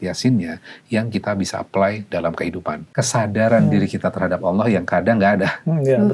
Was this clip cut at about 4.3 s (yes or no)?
no